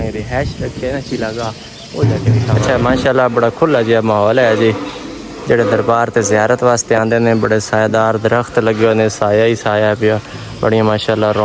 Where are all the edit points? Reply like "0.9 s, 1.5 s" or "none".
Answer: 2.6 s